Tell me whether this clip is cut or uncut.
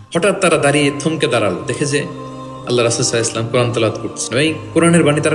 uncut